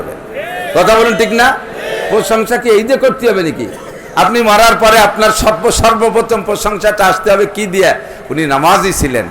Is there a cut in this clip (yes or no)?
no